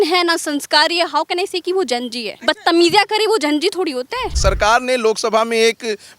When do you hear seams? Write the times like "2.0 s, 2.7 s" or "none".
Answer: 2.2 s, 4.4 s